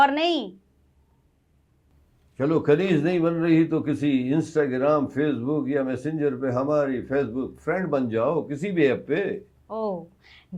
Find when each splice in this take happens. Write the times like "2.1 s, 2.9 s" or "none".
none